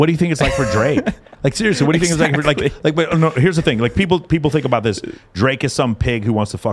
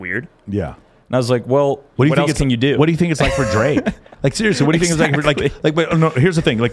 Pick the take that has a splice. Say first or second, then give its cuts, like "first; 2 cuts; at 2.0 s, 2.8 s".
second; 1 cut; at 1.9 s